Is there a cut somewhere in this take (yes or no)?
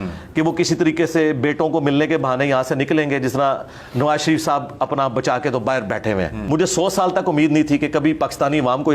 yes